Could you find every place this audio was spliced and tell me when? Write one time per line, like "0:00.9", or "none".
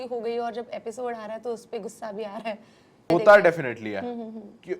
0:03.1